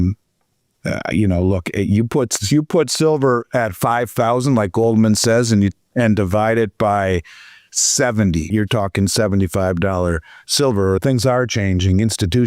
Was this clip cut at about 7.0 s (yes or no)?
no